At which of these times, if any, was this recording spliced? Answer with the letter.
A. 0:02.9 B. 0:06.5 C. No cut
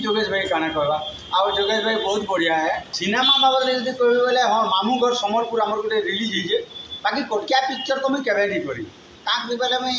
A